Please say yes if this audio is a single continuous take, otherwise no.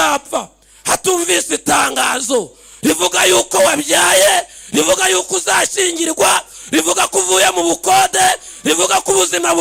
yes